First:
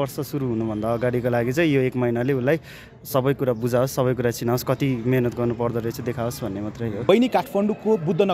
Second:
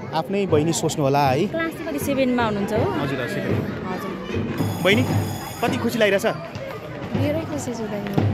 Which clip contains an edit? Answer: first; 1 cut; at 7.1 s

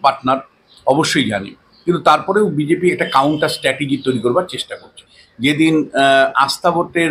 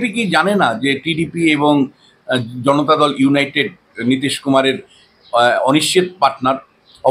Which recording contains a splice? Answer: first; 1 cut; at 5.0 s

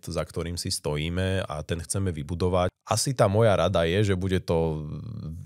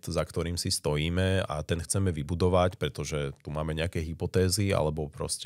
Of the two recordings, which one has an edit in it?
first; 1 cut; at 2.8 s

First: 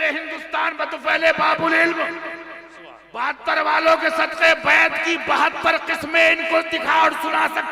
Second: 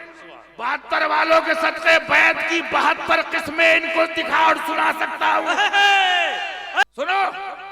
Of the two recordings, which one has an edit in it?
second; 1 cut; at 6.8 s

